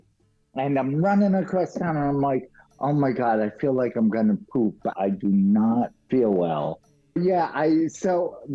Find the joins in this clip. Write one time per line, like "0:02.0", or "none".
0:04.9
0:06.0
0:07.2